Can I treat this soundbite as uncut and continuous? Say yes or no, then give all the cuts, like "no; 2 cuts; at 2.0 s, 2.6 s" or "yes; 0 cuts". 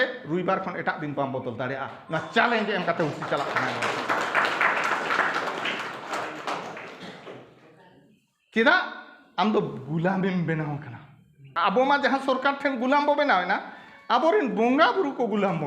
no; 1 cut; at 11.5 s